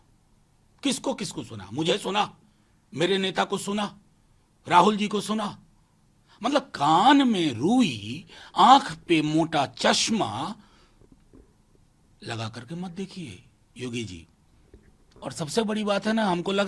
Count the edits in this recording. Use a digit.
0